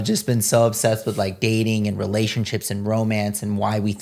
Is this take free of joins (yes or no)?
yes